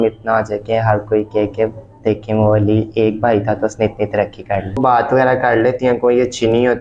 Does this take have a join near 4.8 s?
yes; 1 cut; at 4.8 s

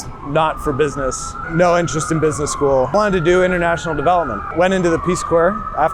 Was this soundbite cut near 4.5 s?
yes; 3 cuts; at 1.3 s, 2.9 s, 4.5 s

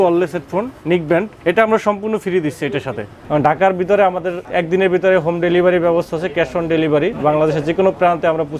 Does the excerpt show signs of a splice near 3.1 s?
yes; 4 cuts; at 1.3 s, 3.1 s, 4.4 s, 7.2 s

